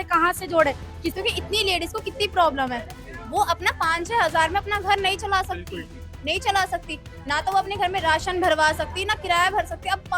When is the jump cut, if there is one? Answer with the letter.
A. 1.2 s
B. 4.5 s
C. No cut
A